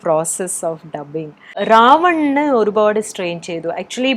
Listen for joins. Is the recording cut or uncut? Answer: cut